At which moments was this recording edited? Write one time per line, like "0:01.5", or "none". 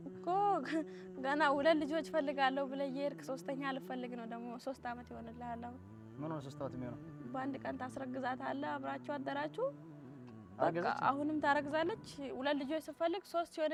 none